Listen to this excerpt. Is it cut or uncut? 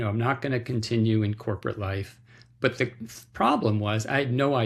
uncut